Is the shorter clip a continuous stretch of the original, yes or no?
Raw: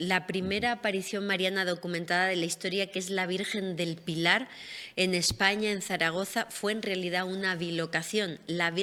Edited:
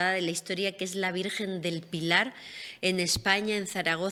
yes